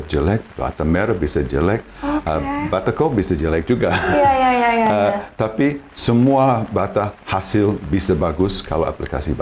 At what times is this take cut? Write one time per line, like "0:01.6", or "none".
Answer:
none